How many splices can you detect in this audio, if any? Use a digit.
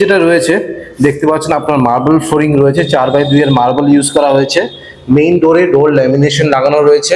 0